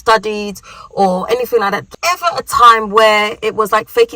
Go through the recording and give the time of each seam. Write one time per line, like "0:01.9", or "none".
0:01.8